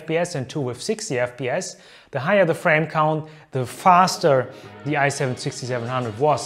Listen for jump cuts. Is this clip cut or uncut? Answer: uncut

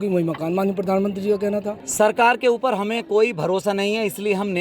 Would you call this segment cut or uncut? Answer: cut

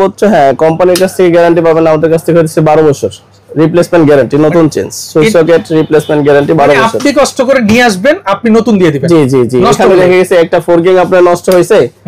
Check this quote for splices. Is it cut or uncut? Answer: uncut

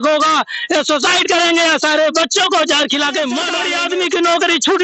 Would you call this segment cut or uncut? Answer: cut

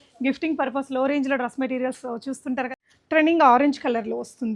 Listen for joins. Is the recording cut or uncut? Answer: cut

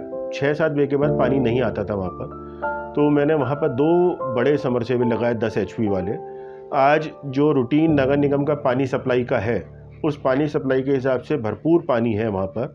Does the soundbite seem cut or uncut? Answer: uncut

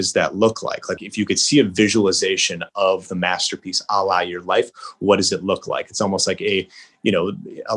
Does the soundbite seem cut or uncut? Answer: cut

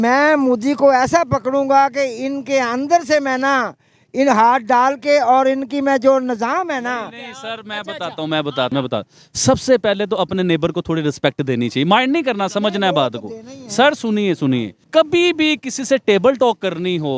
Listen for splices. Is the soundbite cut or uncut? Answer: cut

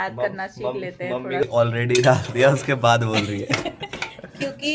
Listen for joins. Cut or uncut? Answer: cut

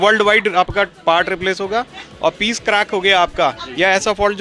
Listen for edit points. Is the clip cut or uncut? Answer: uncut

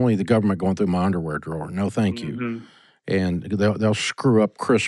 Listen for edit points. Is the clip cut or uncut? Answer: uncut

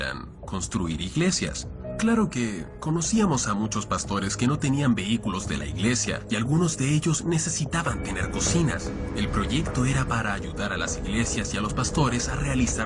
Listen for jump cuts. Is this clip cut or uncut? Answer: cut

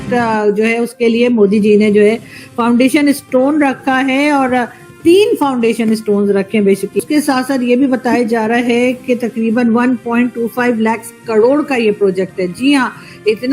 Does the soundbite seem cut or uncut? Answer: cut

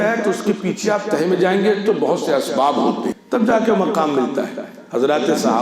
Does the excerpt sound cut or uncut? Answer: cut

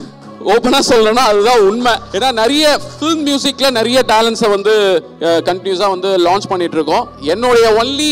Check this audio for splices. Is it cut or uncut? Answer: cut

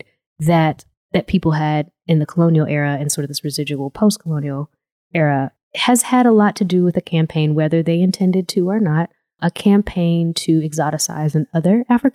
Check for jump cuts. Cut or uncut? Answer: cut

